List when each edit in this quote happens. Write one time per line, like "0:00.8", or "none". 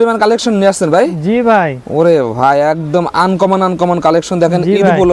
none